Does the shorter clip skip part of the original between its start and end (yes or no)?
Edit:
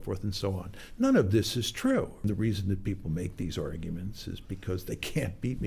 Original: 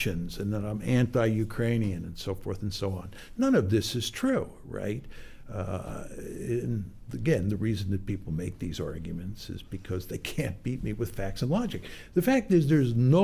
yes